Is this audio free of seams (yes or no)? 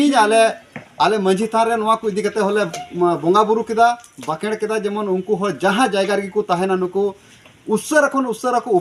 yes